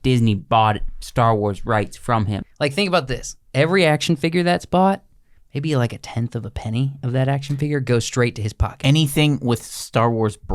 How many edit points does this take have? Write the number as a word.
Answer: one